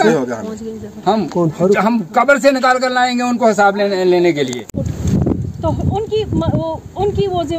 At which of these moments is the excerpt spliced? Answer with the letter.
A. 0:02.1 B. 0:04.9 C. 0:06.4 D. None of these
B